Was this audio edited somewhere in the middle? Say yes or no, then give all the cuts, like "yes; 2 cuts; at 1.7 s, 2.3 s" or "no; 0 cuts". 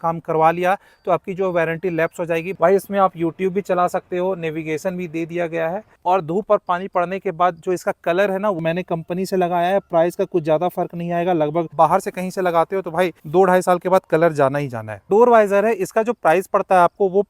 yes; 6 cuts; at 2.5 s, 5.9 s, 8.6 s, 11.7 s, 13.2 s, 15.1 s